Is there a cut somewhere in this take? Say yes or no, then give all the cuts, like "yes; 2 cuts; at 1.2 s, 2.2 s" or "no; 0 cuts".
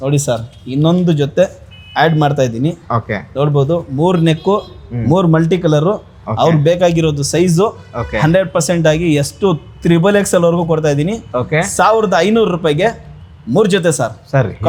no; 0 cuts